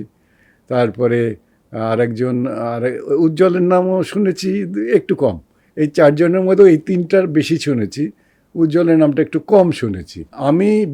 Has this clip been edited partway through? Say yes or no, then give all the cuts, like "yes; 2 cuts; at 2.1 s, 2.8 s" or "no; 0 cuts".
no; 0 cuts